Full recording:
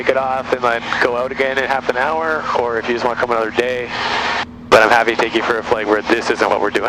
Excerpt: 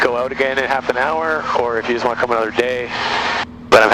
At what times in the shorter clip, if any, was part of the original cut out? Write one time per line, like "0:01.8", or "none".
none